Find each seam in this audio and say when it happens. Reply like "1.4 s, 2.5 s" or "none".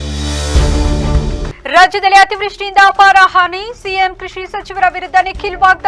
1.5 s